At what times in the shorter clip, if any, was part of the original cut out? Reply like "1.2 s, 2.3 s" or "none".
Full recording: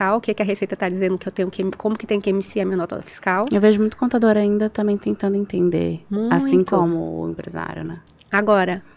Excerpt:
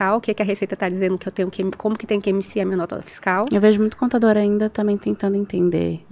none